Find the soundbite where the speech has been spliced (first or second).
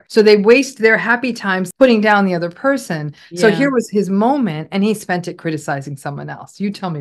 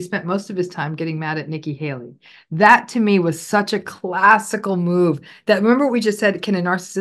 first